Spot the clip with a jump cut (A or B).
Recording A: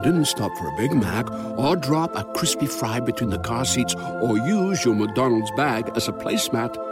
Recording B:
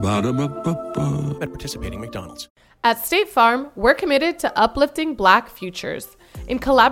B